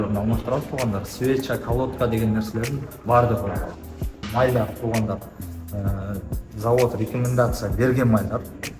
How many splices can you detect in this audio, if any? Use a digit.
1